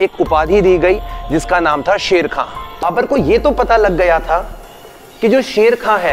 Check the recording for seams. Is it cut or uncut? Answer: cut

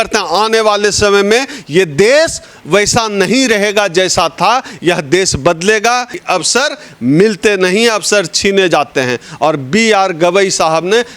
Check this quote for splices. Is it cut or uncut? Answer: cut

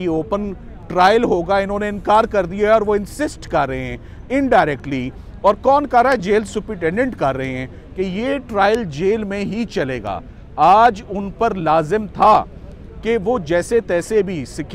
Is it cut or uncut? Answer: uncut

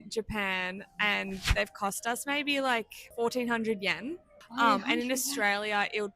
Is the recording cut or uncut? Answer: cut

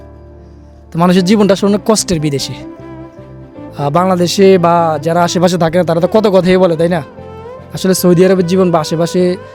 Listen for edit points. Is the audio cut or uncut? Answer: uncut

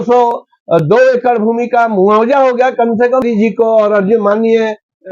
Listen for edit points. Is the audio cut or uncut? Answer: cut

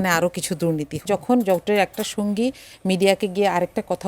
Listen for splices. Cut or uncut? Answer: cut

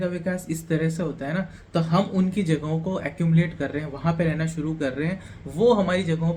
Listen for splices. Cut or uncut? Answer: uncut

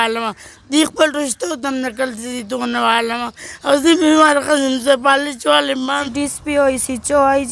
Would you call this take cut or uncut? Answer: cut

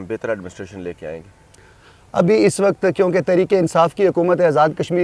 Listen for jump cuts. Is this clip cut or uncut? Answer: uncut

